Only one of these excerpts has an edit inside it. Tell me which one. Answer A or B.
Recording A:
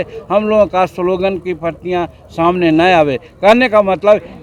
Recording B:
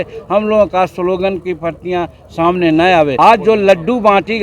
B